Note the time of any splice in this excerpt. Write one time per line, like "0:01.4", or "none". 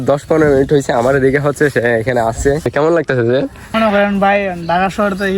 0:02.7
0:03.7